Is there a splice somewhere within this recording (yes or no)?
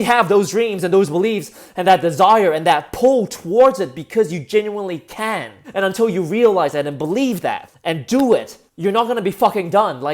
yes